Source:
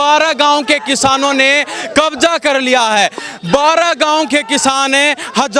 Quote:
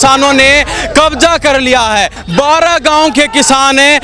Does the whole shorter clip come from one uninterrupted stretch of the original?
no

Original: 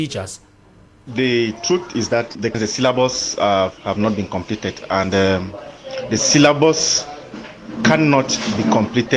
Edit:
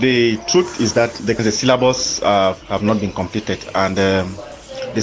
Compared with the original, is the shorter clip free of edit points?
yes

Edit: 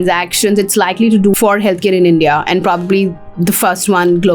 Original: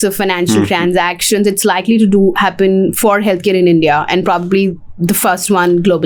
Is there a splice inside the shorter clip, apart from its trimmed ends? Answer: yes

